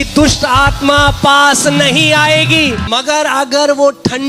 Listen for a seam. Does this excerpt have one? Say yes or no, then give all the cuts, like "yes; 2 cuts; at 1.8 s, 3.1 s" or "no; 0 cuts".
yes; 1 cut; at 2.8 s